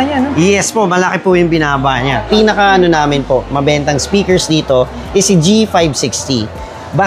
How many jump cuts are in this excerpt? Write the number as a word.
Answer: one